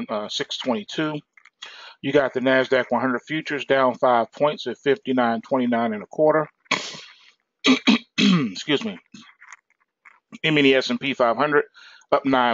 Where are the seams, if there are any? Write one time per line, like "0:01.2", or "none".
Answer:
0:02.9